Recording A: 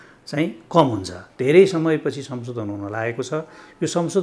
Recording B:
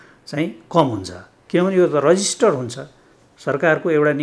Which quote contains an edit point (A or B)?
A